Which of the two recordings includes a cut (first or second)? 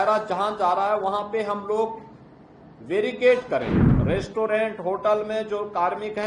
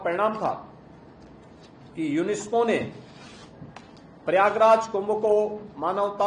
first